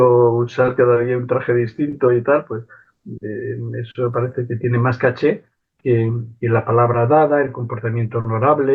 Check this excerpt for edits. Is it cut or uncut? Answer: uncut